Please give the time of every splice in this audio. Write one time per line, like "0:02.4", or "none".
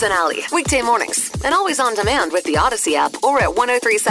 none